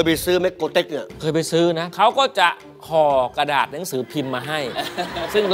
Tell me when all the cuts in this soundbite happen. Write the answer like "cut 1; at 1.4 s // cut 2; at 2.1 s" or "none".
cut 1; at 1.0 s // cut 2; at 1.9 s